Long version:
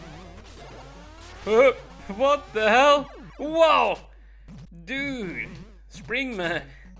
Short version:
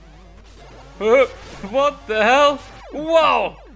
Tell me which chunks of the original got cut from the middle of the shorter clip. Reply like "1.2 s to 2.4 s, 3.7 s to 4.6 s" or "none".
1.0 s to 1.4 s